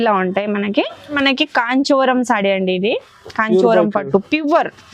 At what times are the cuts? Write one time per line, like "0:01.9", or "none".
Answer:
0:01.2